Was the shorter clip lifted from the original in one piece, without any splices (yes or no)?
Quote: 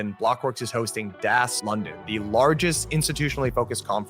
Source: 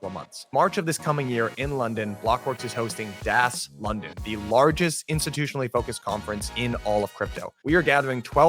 no